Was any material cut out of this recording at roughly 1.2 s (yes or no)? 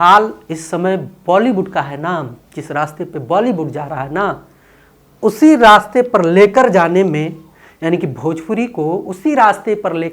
no